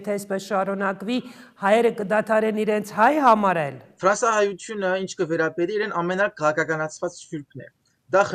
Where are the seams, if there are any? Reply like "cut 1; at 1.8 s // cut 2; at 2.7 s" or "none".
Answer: cut 1; at 3.8 s